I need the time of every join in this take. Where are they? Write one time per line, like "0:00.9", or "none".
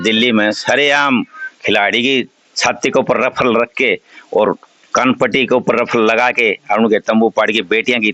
none